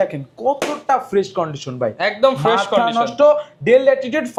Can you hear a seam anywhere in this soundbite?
no; 0 cuts

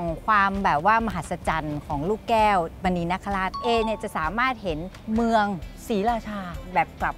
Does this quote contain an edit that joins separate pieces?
yes; 3 cuts; at 3.6 s, 4.9 s, 5.7 s

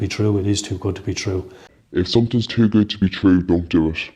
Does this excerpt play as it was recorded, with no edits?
no; 1 cut; at 1.6 s

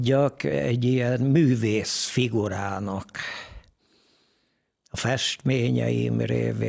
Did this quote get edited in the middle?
no; 0 cuts

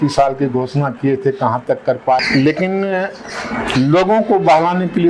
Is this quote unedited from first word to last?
no; 1 cut; at 2.2 s

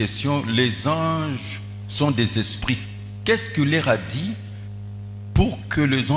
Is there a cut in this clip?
no; 0 cuts

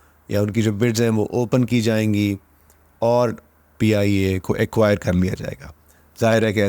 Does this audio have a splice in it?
no; 0 cuts

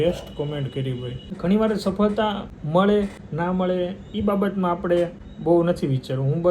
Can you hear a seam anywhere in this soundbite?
yes; 4 cuts; at 1.2 s, 2.5 s, 3.2 s, 5.3 s

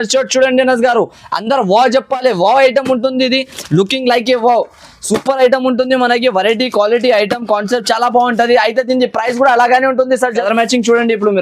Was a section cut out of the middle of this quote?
yes; 1 cut; at 10.4 s

